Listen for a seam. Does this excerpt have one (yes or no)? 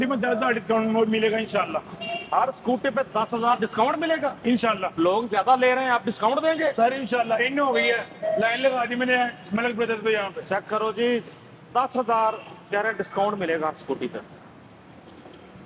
no